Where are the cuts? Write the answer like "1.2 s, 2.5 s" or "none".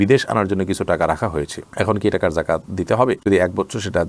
none